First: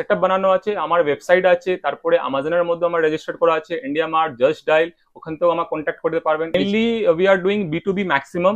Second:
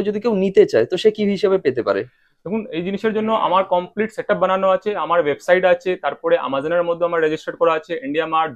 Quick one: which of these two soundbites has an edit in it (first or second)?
first